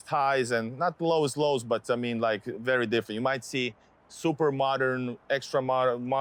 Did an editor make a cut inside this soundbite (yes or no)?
no